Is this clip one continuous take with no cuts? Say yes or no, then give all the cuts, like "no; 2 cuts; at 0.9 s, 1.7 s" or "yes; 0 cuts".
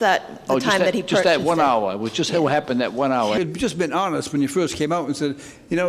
no; 1 cut; at 3.4 s